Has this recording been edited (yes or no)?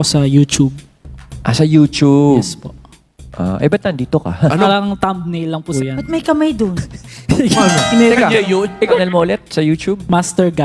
yes